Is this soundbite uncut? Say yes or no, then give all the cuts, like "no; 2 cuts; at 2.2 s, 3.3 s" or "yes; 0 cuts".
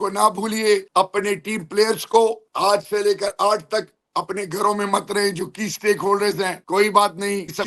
no; 3 cuts; at 0.9 s, 2.5 s, 6.6 s